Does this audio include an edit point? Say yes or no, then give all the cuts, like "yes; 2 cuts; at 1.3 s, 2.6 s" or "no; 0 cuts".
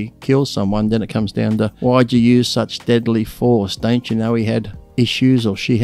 yes; 2 cuts; at 1.7 s, 4.8 s